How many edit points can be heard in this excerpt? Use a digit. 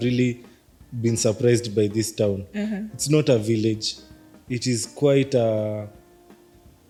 0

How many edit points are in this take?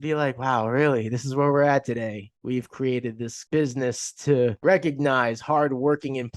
3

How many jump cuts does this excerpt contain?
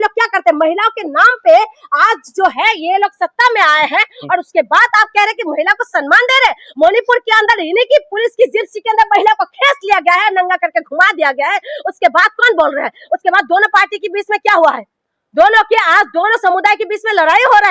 0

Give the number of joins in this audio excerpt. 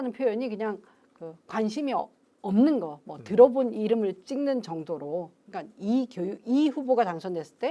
0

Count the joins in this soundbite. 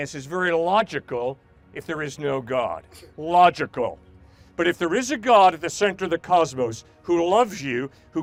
0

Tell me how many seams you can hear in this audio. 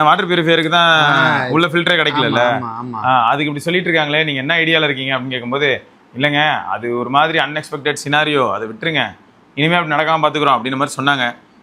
0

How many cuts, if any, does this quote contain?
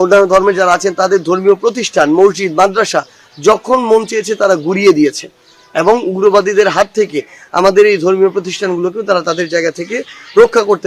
0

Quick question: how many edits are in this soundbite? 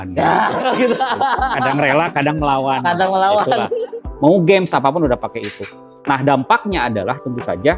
1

